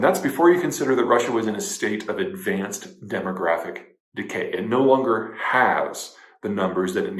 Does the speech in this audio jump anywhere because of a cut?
no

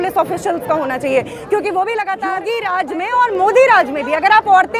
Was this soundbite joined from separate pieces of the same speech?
yes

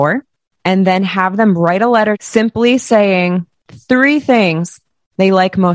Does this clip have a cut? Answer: yes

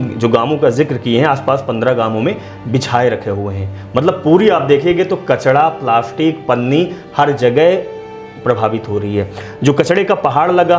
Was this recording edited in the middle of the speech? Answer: no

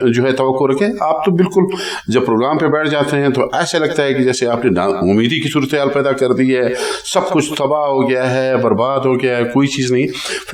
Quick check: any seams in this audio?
no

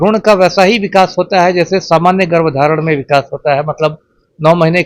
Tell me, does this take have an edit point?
no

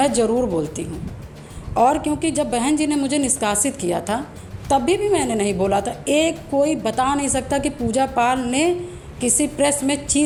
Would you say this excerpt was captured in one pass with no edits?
yes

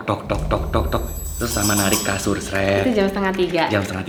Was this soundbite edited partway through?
no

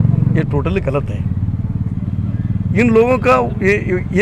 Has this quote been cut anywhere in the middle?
no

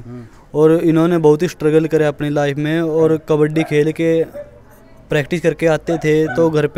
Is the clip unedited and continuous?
yes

